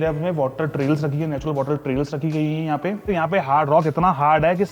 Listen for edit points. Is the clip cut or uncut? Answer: cut